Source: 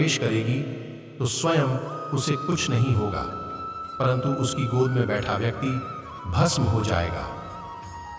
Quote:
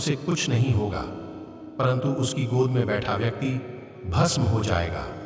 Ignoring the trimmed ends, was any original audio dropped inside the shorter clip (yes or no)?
no